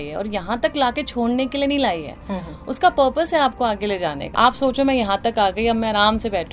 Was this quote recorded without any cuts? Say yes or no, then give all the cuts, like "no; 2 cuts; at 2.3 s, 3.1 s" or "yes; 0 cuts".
no; 1 cut; at 4.2 s